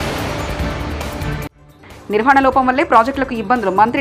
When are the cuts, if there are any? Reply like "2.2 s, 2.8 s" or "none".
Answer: 1.6 s